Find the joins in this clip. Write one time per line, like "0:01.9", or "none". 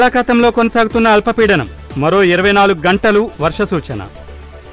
none